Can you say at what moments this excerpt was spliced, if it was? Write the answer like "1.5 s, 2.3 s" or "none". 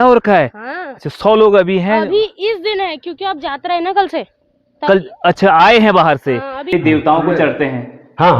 6.7 s